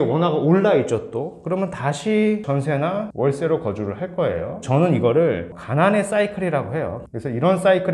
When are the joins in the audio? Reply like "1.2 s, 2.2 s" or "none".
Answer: 4.6 s